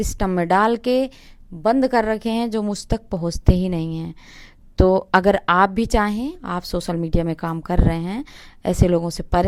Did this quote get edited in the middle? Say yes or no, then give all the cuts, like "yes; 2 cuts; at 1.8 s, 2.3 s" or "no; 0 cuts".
no; 0 cuts